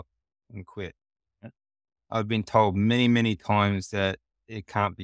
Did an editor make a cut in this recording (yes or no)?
no